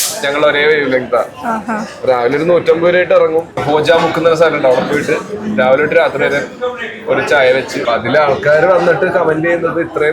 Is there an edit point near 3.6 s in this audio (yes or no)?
yes